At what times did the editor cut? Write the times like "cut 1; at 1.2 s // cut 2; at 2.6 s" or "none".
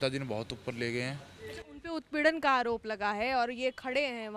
none